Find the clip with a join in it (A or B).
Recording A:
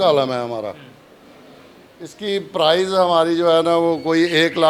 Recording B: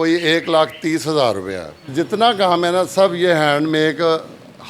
B